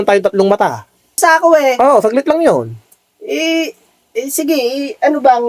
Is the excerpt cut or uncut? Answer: cut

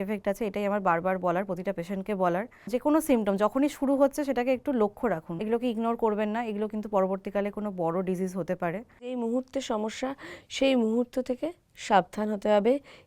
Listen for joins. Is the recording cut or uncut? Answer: cut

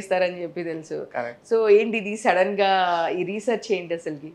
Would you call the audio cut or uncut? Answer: uncut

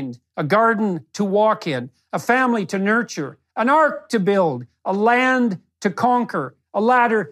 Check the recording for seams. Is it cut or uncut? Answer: cut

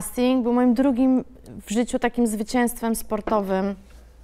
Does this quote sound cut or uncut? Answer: uncut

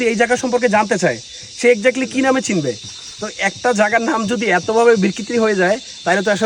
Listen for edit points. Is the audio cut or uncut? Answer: uncut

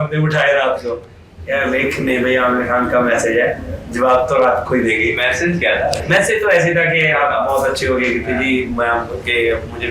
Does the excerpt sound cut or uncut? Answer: uncut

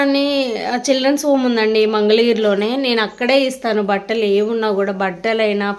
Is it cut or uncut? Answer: uncut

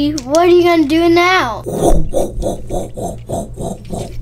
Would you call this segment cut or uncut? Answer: cut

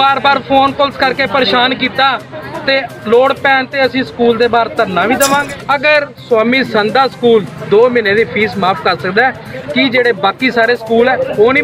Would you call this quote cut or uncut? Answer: cut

